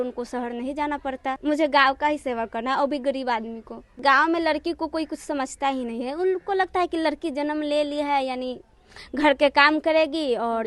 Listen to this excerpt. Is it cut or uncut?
cut